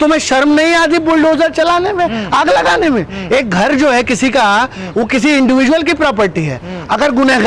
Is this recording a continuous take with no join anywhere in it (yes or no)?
yes